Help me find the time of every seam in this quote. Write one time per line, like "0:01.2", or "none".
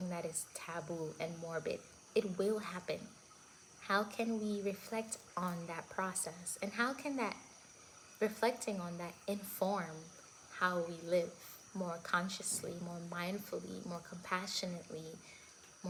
none